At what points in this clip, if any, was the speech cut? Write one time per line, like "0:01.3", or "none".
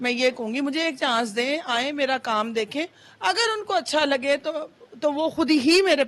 none